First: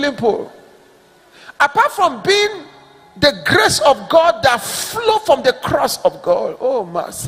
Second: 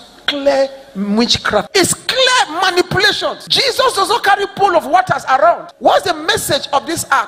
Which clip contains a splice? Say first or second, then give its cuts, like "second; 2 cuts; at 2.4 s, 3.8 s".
second; 3 cuts; at 1.7 s, 3.5 s, 5.7 s